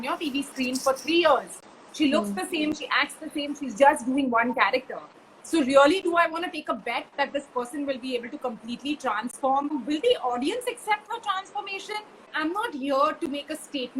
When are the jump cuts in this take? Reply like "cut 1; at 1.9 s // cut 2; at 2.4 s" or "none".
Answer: cut 1; at 9.7 s // cut 2; at 12.3 s